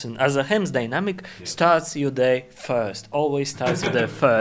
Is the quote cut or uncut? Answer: uncut